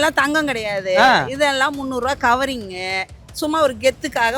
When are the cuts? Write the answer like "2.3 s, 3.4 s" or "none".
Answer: none